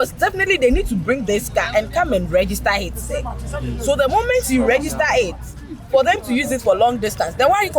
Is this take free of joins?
yes; 0 cuts

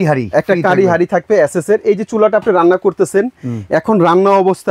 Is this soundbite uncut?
yes; 0 cuts

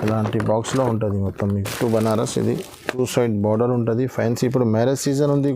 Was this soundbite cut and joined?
yes; 1 cut; at 1.7 s

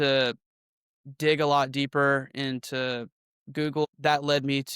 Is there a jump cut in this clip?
yes; 1 cut; at 3.8 s

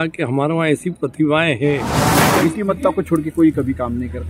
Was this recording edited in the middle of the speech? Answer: yes; 1 cut; at 2.2 s

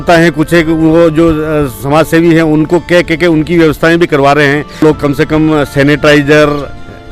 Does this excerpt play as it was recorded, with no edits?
no; 1 cut; at 4.8 s

